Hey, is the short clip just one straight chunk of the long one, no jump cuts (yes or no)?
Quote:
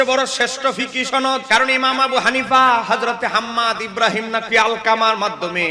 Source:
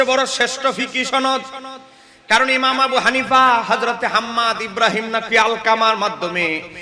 no